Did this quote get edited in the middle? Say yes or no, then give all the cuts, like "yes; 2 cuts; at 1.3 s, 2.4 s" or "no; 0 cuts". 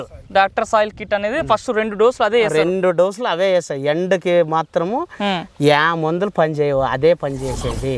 no; 0 cuts